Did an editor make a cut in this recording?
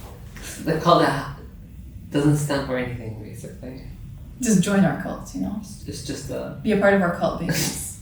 no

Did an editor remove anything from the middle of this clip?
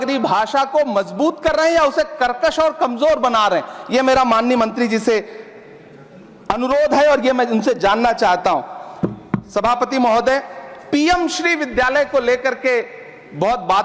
no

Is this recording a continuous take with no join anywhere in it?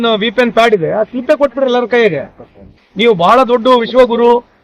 yes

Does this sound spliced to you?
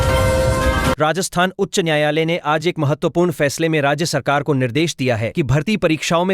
yes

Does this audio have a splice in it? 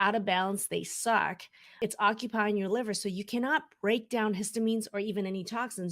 yes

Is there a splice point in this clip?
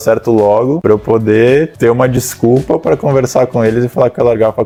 no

